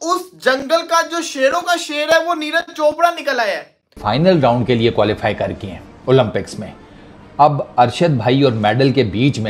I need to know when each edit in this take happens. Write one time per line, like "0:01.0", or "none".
0:04.0